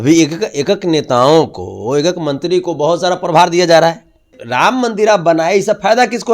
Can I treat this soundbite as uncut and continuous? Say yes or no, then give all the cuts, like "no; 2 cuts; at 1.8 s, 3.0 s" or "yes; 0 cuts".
no; 1 cut; at 4.4 s